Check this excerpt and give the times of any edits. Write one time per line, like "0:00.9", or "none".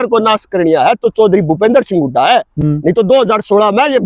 none